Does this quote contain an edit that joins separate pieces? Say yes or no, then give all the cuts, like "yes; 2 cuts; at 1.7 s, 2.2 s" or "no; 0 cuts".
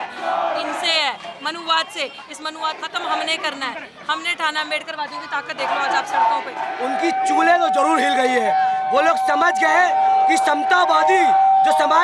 yes; 2 cuts; at 2.9 s, 6.7 s